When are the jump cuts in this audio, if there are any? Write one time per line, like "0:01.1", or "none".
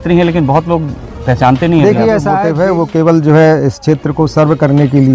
0:02.4